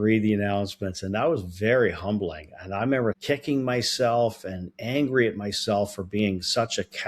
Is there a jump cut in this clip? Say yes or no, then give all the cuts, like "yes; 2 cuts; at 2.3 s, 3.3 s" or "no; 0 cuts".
yes; 1 cut; at 3.2 s